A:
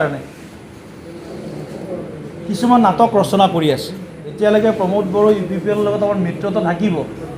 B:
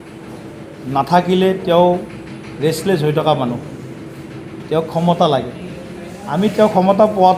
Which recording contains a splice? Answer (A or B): A